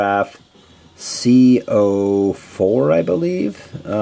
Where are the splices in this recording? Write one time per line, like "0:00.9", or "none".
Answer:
0:01.2